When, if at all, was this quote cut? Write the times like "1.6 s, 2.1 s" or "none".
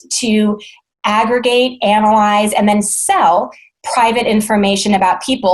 none